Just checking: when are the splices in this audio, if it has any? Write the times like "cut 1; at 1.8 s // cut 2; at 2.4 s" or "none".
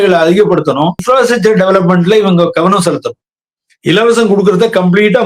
cut 1; at 1.0 s